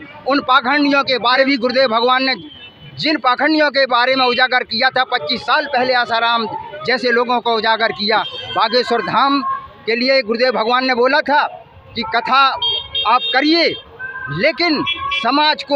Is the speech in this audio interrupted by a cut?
yes; 2 cuts; at 1.4 s, 8.3 s

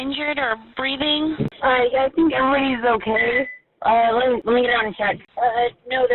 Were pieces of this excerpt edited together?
yes; 3 cuts; at 1.5 s, 4.4 s, 5.3 s

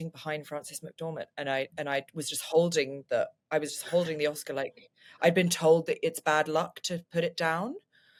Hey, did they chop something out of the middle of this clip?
no; 0 cuts

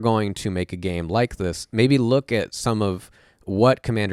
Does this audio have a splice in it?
no; 0 cuts

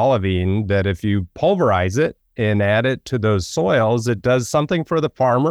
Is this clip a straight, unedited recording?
yes; 0 cuts

